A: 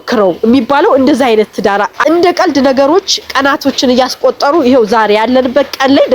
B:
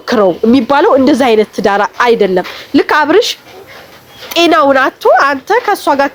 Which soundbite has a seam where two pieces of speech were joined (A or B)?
A